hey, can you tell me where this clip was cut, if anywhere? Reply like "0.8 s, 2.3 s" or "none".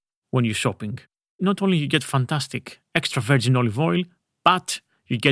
1.4 s